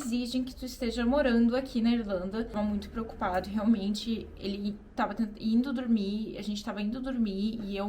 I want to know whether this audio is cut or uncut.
cut